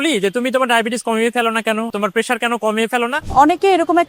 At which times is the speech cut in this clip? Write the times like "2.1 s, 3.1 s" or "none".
1.9 s, 3.2 s